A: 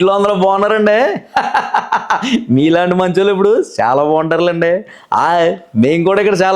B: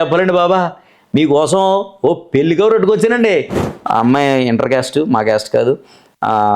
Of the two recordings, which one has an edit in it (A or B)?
B